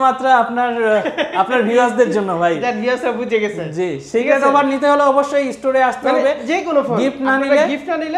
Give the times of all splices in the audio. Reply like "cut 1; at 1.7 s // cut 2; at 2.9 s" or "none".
none